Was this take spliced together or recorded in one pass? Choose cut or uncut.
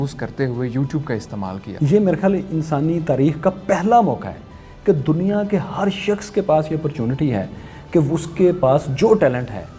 cut